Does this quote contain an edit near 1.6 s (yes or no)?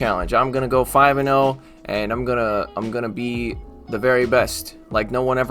no